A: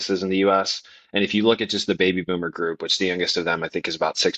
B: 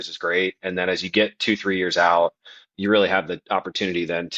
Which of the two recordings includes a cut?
B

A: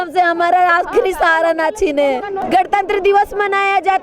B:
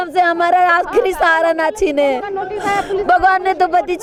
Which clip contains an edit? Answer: A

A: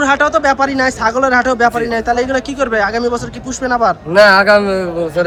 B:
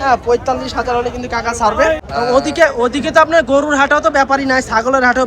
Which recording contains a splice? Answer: B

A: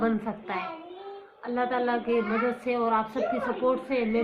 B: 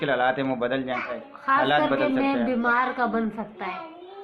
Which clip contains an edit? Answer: B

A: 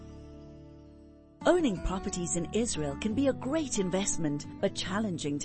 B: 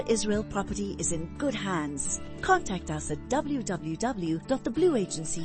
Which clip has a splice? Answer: A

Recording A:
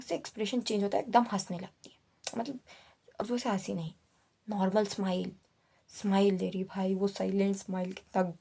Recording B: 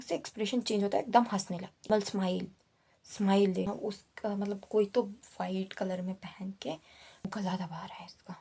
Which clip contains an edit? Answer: B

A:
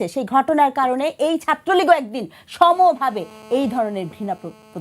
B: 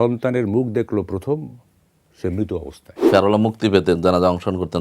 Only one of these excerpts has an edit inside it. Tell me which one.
B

